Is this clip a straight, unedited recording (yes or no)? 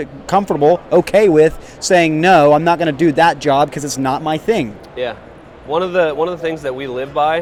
yes